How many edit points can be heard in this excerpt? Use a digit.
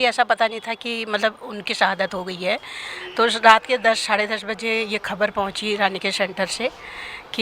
0